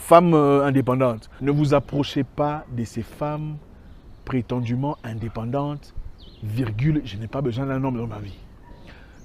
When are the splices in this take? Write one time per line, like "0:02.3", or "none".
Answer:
0:01.2